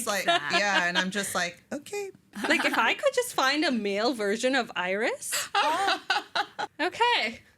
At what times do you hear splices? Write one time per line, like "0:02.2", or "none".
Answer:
0:02.3
0:06.6

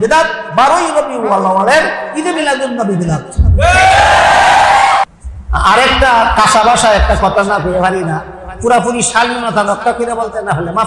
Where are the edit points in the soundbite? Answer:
0:05.1

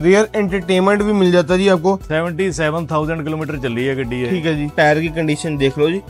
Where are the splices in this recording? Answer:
0:02.0
0:04.7

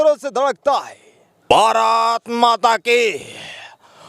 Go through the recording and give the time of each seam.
0:01.4

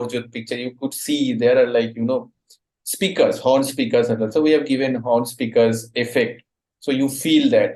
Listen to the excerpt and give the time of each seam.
none

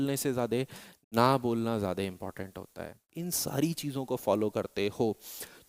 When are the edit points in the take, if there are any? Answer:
0:03.2

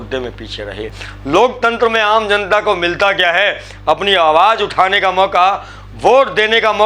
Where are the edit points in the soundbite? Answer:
0:01.0

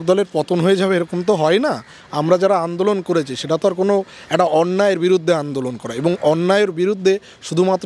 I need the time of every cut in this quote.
none

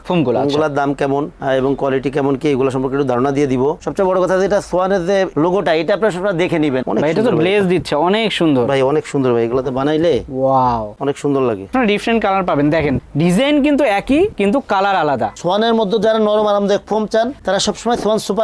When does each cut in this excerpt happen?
0:03.8
0:06.8
0:11.7
0:15.3

